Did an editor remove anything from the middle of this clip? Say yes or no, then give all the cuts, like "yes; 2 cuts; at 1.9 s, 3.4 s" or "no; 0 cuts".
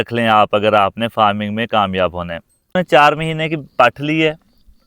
yes; 1 cut; at 2.7 s